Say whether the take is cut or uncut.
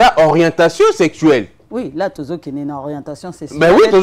uncut